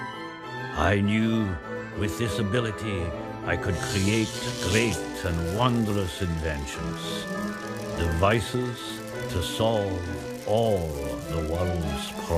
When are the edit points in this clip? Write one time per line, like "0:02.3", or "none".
0:06.9